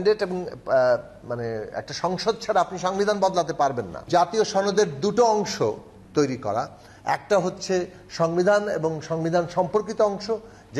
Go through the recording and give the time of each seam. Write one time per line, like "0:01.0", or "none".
0:04.0